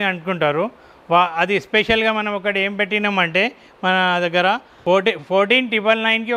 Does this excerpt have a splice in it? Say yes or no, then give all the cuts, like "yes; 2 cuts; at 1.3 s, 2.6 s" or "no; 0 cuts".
no; 0 cuts